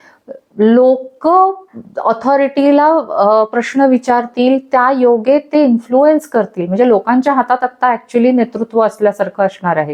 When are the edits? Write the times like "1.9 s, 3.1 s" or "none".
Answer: none